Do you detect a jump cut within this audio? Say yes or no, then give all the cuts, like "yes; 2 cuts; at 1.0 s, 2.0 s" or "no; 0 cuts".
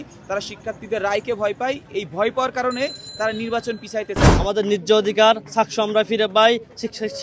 yes; 1 cut; at 4.3 s